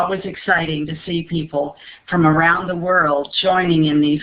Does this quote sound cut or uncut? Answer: cut